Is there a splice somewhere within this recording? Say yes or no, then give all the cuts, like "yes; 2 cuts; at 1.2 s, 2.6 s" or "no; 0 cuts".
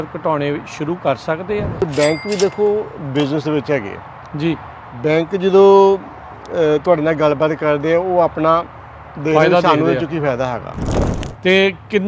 yes; 2 cuts; at 1.8 s, 10.7 s